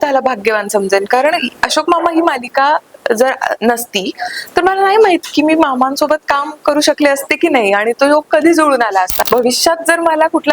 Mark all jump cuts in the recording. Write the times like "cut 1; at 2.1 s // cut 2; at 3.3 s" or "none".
cut 1; at 9.1 s